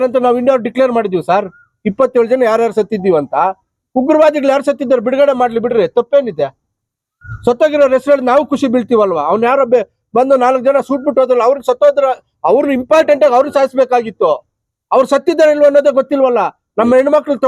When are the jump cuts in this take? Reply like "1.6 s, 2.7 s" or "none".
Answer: none